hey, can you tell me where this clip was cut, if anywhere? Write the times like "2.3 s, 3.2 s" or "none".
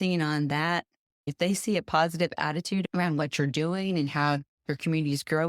1.3 s, 2.9 s